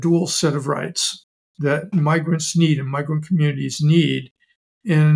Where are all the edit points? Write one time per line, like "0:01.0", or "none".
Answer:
0:01.9